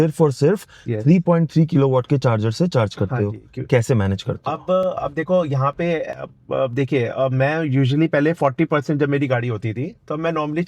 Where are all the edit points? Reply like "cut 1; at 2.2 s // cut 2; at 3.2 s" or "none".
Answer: none